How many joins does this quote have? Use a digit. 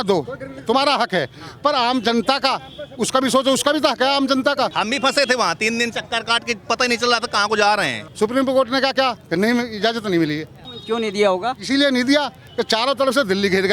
2